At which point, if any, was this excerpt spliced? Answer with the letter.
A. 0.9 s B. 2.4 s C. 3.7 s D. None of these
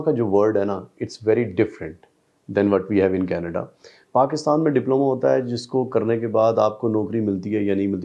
D